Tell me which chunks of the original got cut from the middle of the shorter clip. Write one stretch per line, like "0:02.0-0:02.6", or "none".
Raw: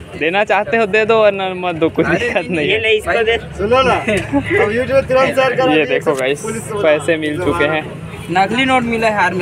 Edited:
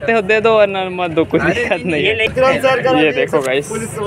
0:02.9-0:05.0